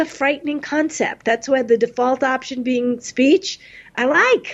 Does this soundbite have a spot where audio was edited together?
no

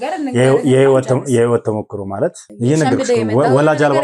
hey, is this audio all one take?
no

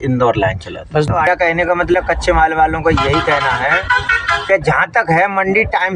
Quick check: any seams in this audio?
yes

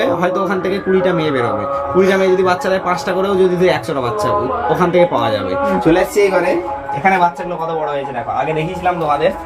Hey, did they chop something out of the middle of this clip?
yes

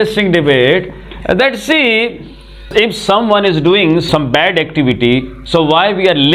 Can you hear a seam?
yes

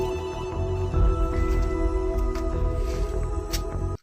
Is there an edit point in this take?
no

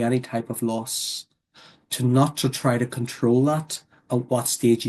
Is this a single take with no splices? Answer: yes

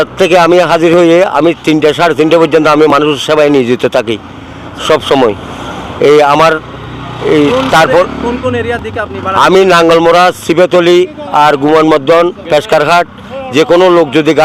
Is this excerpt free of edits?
yes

